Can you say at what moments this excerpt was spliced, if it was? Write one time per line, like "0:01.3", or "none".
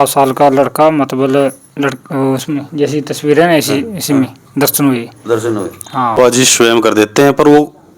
0:06.5